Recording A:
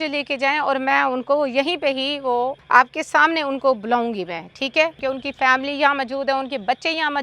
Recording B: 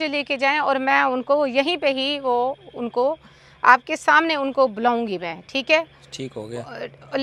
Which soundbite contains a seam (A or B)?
A